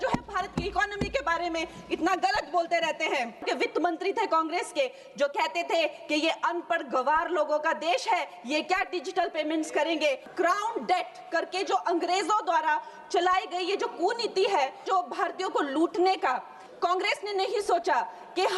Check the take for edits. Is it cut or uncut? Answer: cut